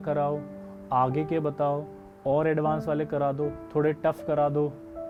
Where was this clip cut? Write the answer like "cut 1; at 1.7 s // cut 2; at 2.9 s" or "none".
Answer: none